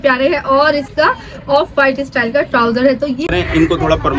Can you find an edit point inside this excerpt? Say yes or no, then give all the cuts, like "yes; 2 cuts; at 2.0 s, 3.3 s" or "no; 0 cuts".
yes; 1 cut; at 3.2 s